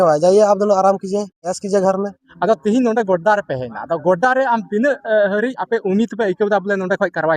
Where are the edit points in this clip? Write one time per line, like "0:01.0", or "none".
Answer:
0:02.2

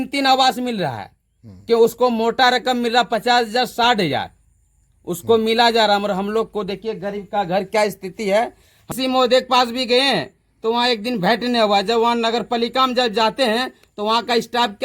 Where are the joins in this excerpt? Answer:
0:08.9

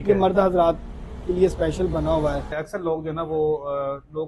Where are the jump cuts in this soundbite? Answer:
0:02.5

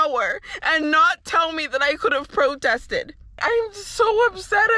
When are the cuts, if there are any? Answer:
0:03.4

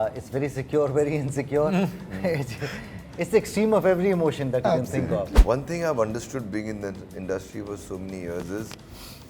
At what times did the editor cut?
0:05.3

